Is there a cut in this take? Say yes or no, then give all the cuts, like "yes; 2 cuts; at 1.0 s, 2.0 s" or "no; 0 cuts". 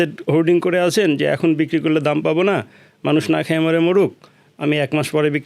no; 0 cuts